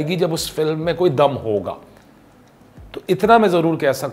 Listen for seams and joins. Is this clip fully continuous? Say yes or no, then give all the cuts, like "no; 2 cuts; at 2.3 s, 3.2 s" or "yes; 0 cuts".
yes; 0 cuts